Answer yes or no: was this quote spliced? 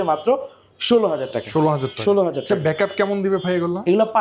no